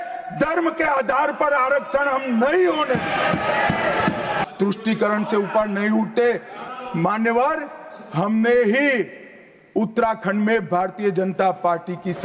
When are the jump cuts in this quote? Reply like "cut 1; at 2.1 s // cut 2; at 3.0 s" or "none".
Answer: cut 1; at 4.4 s // cut 2; at 6.5 s